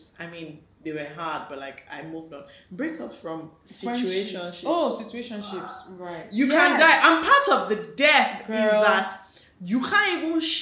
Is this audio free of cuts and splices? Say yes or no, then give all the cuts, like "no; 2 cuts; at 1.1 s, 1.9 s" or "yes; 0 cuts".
yes; 0 cuts